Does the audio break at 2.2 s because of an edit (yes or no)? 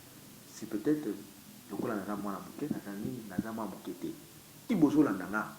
no